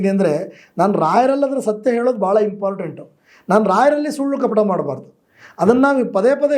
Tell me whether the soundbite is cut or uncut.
uncut